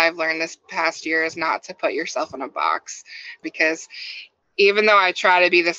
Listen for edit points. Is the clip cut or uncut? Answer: cut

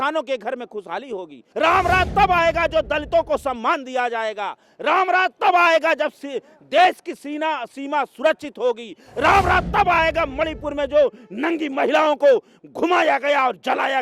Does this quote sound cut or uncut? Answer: cut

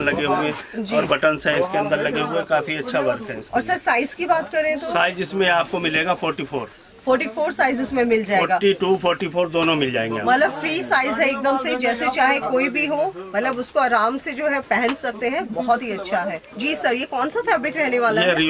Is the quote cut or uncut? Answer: uncut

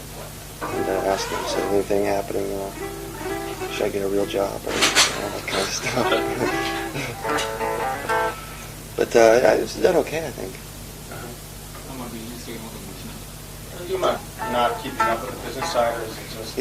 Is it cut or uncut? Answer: cut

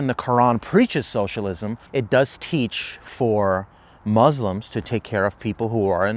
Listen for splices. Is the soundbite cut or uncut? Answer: uncut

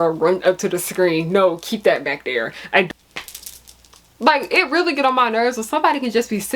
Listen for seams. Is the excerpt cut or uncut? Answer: cut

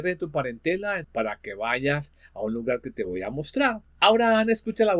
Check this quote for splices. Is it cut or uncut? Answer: cut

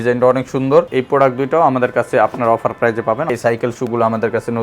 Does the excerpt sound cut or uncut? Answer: cut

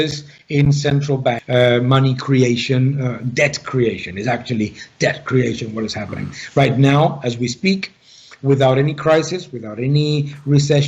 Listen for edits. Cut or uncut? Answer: cut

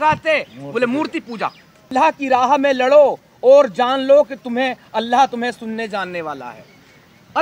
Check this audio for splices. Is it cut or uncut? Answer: cut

